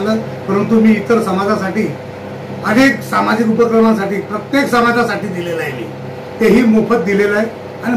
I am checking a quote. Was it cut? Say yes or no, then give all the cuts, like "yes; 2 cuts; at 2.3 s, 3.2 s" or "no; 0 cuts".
no; 0 cuts